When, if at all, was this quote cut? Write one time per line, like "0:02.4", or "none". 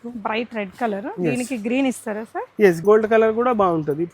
0:02.8